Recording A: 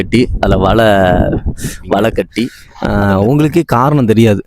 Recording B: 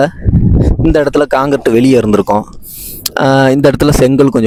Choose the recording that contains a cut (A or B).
A